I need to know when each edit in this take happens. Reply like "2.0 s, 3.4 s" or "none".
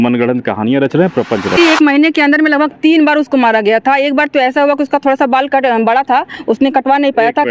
1.6 s